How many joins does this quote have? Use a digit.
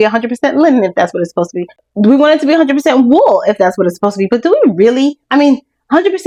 0